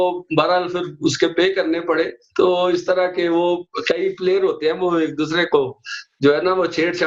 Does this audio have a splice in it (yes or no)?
no